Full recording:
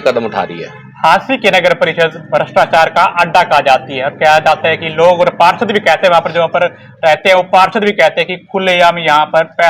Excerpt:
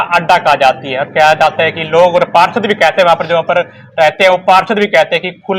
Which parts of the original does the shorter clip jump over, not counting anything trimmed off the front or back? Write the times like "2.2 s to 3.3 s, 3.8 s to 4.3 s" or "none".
none